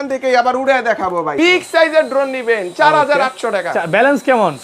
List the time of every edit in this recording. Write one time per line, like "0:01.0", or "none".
0:01.3